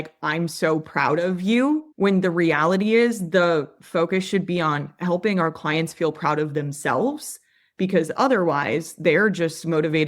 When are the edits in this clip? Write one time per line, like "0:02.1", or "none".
0:01.9